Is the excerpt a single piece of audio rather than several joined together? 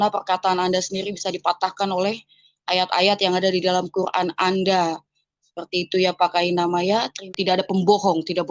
no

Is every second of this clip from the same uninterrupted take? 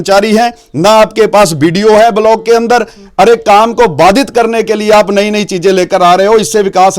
yes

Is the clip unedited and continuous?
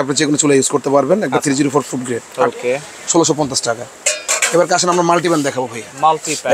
yes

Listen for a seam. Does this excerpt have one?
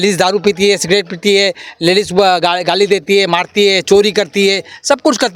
no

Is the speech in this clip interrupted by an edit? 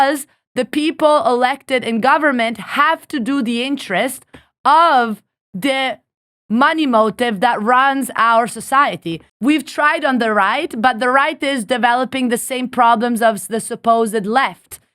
yes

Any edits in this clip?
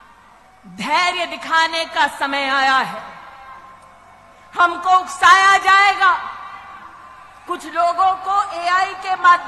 no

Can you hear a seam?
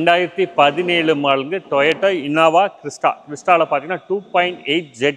no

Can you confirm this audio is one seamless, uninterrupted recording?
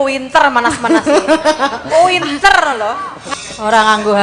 no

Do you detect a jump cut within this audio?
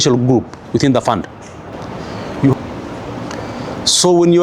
yes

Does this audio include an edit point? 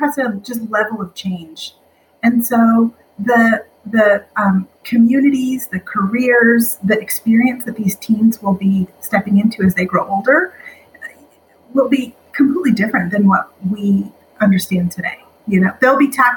no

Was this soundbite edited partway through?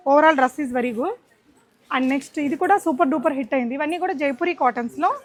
no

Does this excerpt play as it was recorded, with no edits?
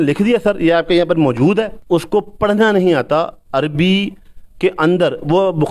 no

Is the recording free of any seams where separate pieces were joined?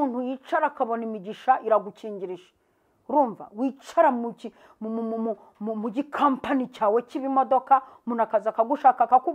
yes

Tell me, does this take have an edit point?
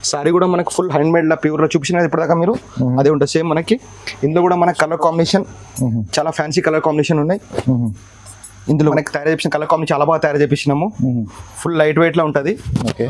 yes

